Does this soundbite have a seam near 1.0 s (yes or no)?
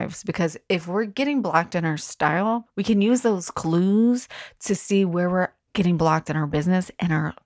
no